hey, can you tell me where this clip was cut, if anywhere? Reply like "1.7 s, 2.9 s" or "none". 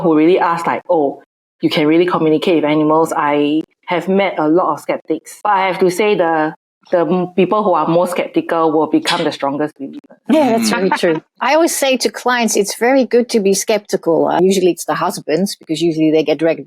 11.3 s, 14.4 s